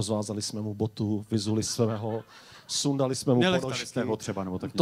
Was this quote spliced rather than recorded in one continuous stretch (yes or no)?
no